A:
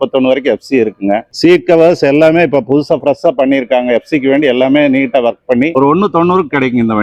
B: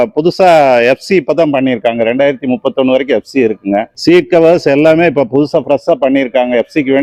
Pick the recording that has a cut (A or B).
A